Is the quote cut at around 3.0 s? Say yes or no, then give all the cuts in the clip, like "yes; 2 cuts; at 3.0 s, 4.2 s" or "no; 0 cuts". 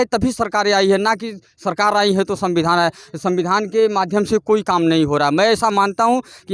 no; 0 cuts